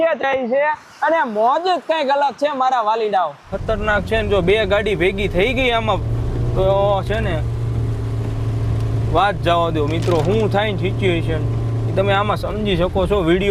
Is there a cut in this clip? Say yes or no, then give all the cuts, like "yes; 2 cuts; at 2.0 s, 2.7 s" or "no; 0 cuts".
yes; 1 cut; at 3.5 s